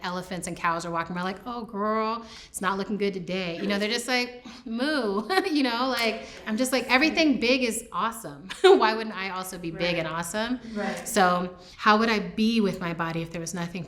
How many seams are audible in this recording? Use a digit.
1